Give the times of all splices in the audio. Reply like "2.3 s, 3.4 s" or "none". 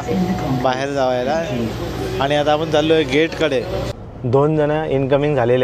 4.0 s